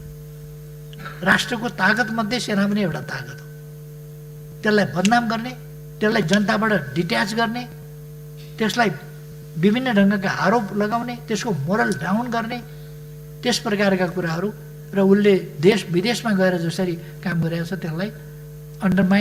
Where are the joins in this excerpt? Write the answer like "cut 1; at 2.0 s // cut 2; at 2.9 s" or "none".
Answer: none

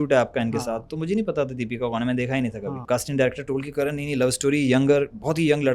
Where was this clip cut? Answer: cut 1; at 2.7 s

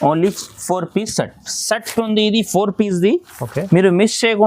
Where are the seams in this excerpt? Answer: cut 1; at 1.5 s

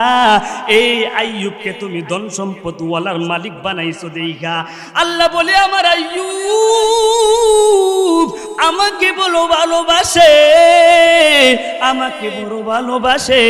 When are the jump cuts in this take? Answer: none

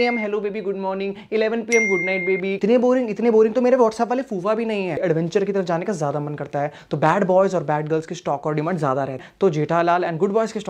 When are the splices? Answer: cut 1; at 2.5 s // cut 2; at 5.0 s // cut 3; at 9.2 s

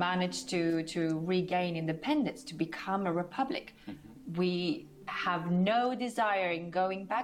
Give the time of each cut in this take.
none

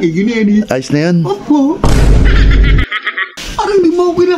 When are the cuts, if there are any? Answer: cut 1; at 1.8 s // cut 2; at 3.2 s

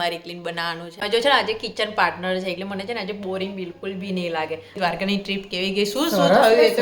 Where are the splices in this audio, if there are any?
cut 1; at 1.0 s // cut 2; at 4.8 s

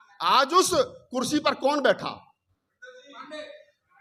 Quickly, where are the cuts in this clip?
none

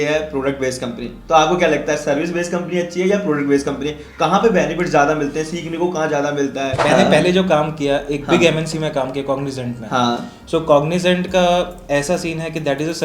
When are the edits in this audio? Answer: cut 1; at 6.8 s

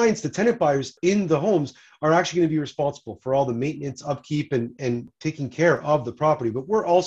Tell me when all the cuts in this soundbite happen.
cut 1; at 0.9 s // cut 2; at 5.1 s

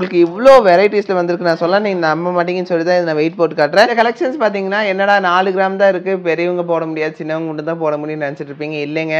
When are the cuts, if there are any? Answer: cut 1; at 4.2 s

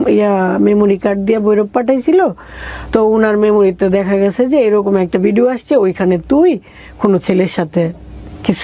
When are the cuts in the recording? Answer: none

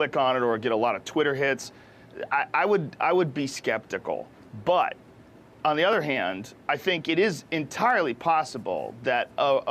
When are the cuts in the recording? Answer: cut 1; at 1.3 s

